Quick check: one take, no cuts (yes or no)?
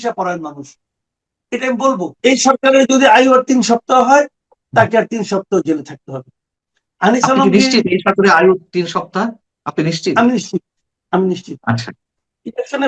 no